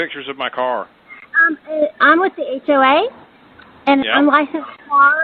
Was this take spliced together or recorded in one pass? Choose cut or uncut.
uncut